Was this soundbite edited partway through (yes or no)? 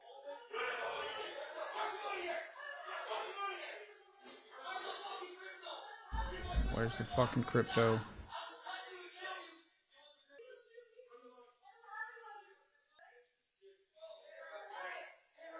yes